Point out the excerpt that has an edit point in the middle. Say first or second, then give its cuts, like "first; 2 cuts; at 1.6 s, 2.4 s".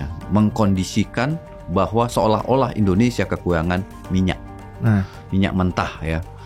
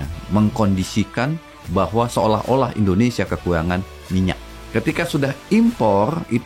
second; 1 cut; at 4.6 s